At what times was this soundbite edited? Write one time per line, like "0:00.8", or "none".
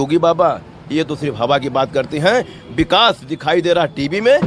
none